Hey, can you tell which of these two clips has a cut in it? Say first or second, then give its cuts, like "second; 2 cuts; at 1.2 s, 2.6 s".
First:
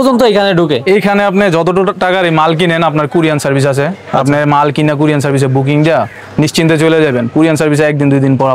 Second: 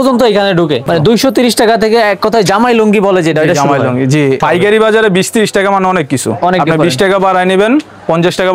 second; 2 cuts; at 0.8 s, 4.4 s